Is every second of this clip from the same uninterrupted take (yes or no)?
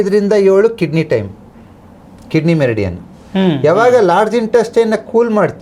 yes